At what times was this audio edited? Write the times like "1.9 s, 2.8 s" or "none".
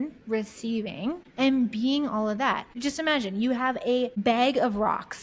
1.2 s, 2.7 s, 4.2 s